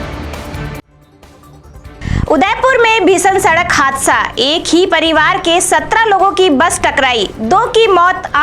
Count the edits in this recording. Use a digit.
1